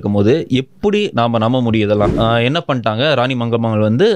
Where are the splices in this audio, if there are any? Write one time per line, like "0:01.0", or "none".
0:02.1